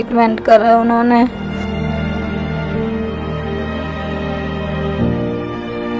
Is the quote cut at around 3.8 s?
no; 1 cut; at 1.4 s

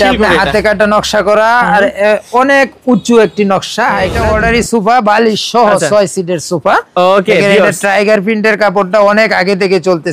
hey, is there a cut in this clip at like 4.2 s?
yes; 1 cut; at 4.2 s

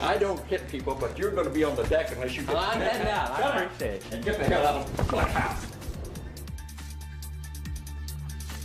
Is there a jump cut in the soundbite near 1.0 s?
yes; 1 cut; at 1.0 s

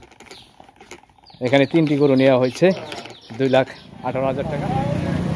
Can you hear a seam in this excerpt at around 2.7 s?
no; 1 cut; at 4.4 s

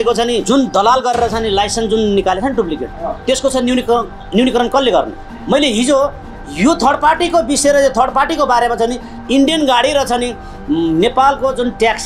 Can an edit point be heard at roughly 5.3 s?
no; 0 cuts

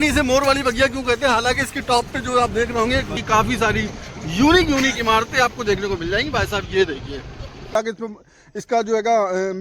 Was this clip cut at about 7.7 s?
yes; 2 cuts; at 3.1 s, 7.7 s

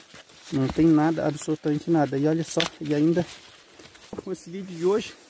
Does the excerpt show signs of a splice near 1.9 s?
no; 1 cut; at 4.3 s

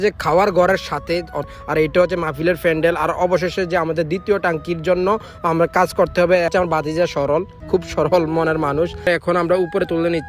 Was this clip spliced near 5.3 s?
no; 3 cuts; at 1.5 s, 6.5 s, 9.1 s

